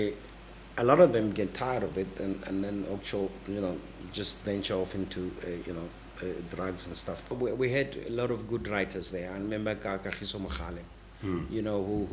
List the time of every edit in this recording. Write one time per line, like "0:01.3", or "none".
0:07.3